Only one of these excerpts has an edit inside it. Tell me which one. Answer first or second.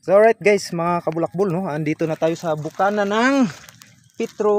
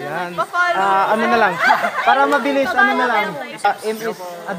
second